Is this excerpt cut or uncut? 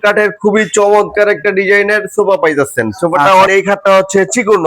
cut